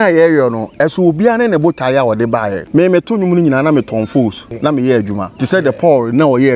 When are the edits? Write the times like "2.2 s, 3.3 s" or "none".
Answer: 2.6 s, 4.5 s, 5.3 s